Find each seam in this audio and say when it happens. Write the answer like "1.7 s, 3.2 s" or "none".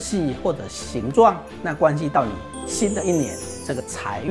none

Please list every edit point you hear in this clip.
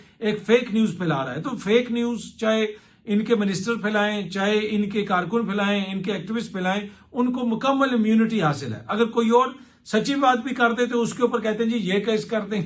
none

